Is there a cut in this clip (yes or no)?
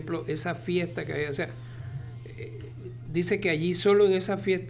no